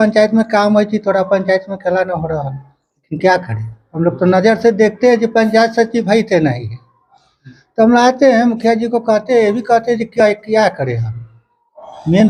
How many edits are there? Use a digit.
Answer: 0